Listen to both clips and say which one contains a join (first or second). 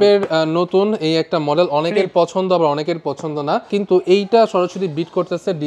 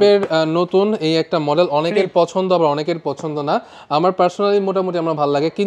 first